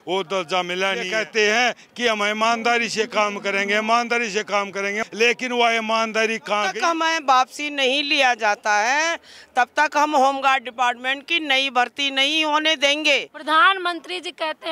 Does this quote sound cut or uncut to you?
cut